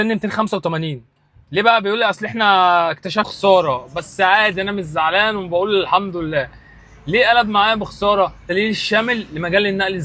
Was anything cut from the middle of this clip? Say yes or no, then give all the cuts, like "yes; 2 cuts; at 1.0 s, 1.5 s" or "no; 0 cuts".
yes; 2 cuts; at 3.3 s, 8.5 s